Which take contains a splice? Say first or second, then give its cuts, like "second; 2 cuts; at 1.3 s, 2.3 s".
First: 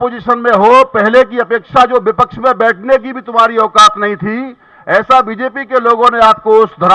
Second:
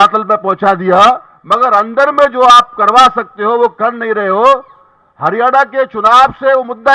second; 1 cut; at 1.4 s